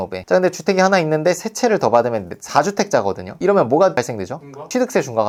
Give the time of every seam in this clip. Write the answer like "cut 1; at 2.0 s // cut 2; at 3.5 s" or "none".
none